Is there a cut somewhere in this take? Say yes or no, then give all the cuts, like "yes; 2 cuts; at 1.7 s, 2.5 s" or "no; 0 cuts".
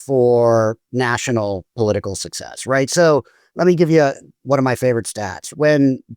yes; 2 cuts; at 3.4 s, 4.3 s